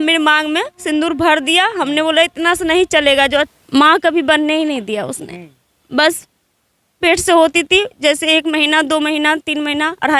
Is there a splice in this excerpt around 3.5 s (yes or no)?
yes